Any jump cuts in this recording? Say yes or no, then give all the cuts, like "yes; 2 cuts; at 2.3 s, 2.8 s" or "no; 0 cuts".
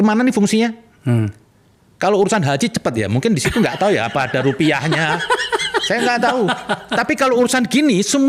no; 0 cuts